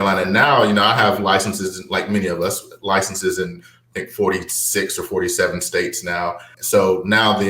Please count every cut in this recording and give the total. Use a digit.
1